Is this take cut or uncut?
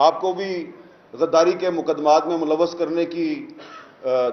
uncut